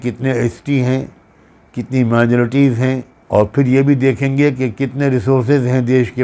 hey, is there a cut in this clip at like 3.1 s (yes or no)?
yes